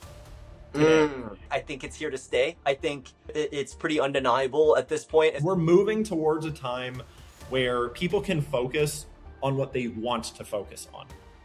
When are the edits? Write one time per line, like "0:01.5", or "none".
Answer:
0:01.5
0:05.4